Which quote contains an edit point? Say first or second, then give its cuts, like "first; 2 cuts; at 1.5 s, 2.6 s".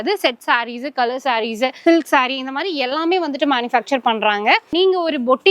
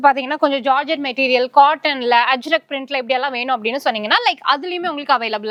first; 2 cuts; at 1.8 s, 4.7 s